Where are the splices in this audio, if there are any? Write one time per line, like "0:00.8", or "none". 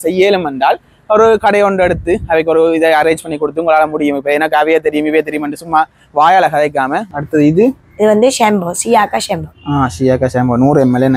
0:07.1